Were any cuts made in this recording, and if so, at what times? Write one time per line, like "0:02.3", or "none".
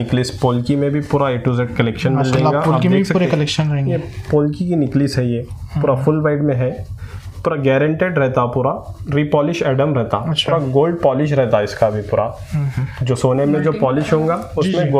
none